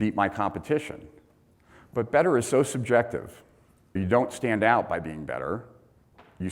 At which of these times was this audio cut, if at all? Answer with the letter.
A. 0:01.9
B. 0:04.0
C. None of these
B